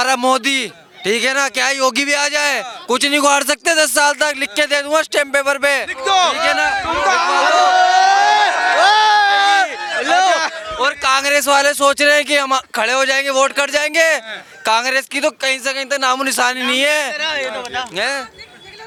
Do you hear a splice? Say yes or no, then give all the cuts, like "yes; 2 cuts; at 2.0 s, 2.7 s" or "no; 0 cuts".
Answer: no; 0 cuts